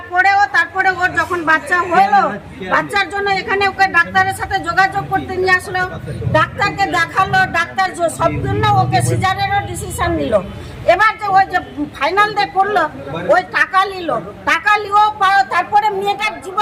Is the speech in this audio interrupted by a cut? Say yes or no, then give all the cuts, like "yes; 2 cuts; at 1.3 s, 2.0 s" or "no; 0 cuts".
no; 0 cuts